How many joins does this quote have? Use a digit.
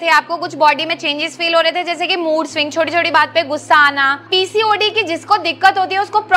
1